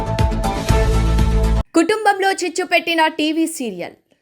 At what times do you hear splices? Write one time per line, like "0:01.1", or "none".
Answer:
none